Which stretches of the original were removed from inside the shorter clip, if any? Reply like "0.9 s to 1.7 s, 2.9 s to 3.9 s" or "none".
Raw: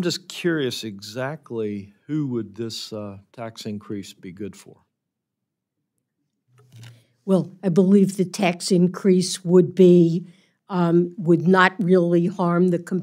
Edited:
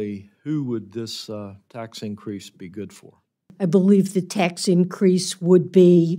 5.1 s to 7.5 s